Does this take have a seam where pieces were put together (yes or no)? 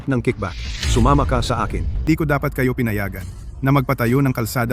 yes